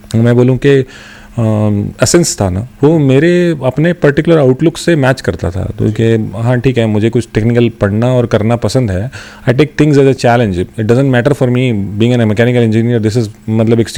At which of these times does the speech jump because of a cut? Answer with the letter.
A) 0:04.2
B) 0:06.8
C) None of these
C